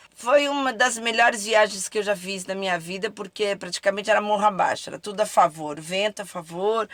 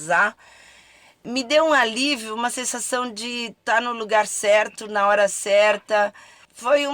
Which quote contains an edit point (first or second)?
second